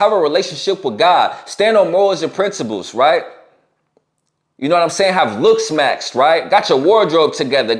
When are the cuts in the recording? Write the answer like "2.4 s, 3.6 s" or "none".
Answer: none